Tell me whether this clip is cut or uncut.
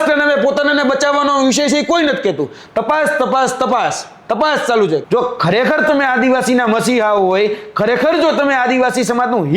cut